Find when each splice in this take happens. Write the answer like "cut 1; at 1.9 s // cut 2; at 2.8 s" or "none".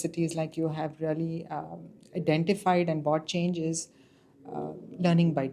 none

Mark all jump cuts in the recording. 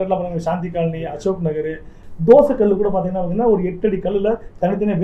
cut 1; at 1.9 s

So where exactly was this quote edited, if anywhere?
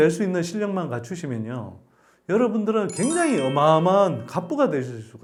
none

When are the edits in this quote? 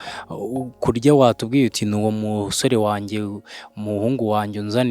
none

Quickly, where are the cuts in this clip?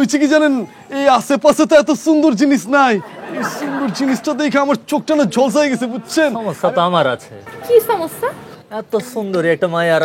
cut 1; at 6.5 s

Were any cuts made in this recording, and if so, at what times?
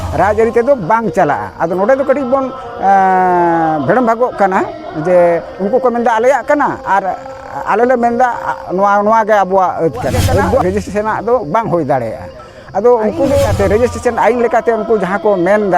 cut 1; at 10.6 s // cut 2; at 13.5 s

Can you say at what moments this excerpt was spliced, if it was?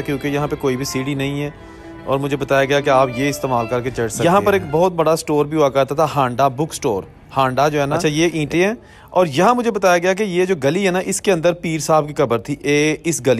cut 1; at 4.1 s // cut 2; at 8.0 s

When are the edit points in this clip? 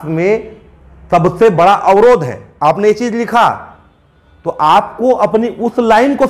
none

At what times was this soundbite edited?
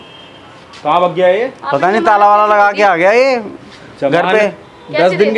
none

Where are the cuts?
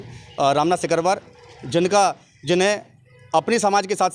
none

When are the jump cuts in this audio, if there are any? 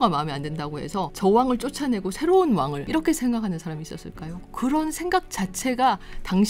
cut 1; at 1.1 s // cut 2; at 2.8 s // cut 3; at 4.3 s

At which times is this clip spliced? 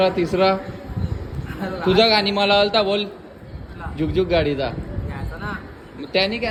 none

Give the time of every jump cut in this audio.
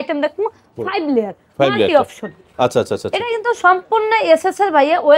none

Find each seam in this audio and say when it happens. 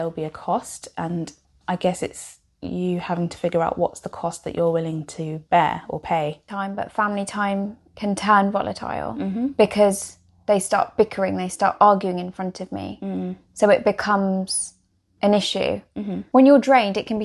cut 1; at 1.4 s // cut 2; at 6.5 s // cut 3; at 16.2 s

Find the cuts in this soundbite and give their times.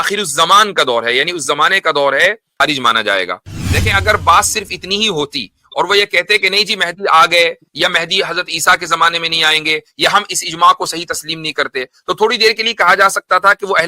cut 1; at 2.6 s

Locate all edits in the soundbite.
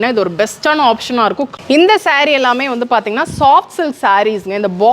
cut 1; at 1.5 s

